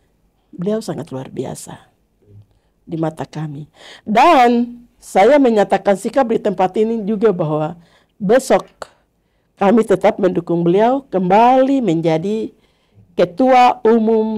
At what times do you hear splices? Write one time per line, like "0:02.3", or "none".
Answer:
none